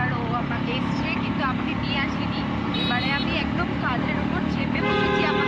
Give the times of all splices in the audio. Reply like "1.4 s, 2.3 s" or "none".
none